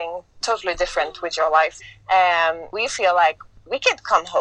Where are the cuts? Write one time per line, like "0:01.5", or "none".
0:01.9
0:02.7